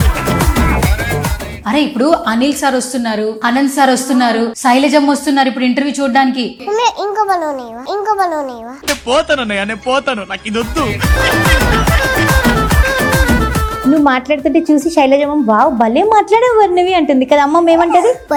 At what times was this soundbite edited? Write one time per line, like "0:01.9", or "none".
none